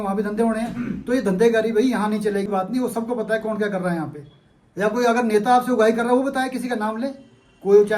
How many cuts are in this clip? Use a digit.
1